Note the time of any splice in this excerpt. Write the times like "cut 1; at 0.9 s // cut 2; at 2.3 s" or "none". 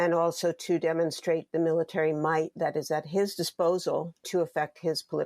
cut 1; at 4.2 s